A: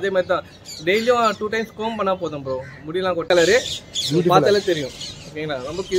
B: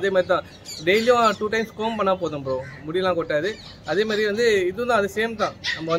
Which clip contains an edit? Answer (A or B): A